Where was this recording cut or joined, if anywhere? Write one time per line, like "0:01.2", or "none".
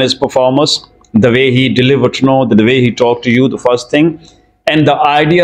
none